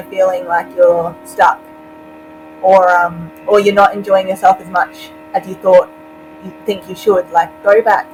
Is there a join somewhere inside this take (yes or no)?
no